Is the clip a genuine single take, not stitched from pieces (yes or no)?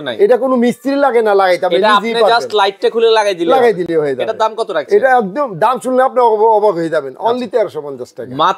yes